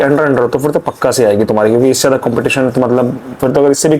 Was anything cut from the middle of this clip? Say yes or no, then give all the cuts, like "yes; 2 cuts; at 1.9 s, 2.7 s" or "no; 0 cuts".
no; 0 cuts